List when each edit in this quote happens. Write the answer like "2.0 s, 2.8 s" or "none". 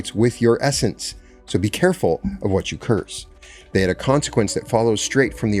none